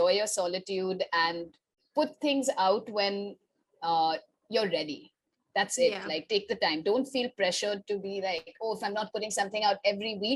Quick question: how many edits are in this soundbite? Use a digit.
0